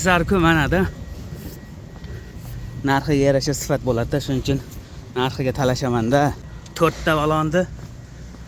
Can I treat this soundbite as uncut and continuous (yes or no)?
yes